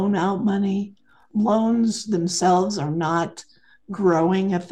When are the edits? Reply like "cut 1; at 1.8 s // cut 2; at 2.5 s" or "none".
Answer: cut 1; at 1.1 s